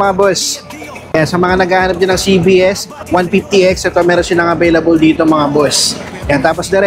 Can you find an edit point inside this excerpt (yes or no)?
yes